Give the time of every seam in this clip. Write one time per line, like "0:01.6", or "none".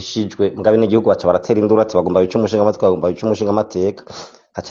none